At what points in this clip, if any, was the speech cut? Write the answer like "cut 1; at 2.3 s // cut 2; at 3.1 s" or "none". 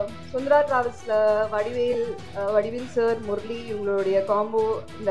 none